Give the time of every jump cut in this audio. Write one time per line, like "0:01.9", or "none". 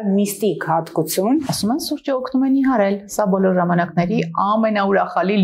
0:01.5

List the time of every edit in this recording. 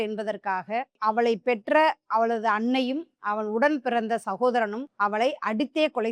0:04.8

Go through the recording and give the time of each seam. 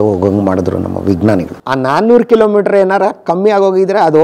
0:01.6

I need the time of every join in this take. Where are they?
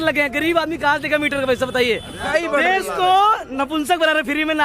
0:02.3

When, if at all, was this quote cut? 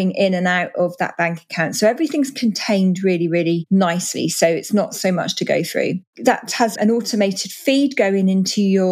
none

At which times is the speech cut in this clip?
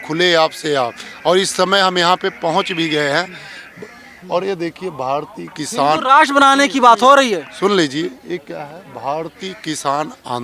none

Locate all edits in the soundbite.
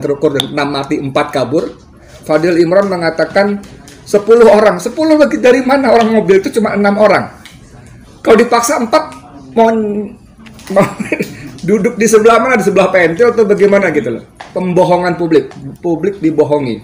0:02.1
0:14.5

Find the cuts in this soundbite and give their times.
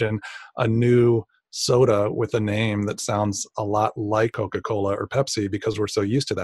0:04.3

